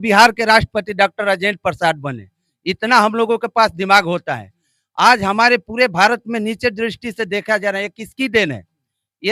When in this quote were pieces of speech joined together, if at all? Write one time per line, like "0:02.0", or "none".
none